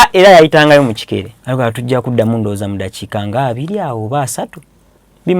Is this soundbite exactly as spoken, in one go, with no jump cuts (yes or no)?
no